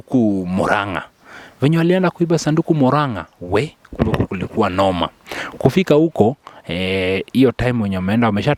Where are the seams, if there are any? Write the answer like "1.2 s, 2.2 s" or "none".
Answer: none

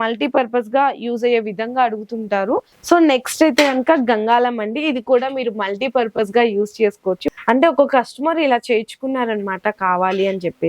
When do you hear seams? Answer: 2.7 s, 7.2 s

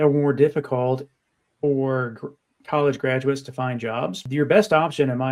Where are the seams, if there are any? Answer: 4.2 s

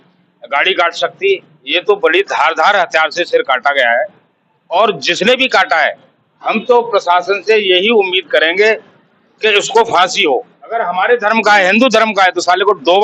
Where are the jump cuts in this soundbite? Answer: 10.6 s

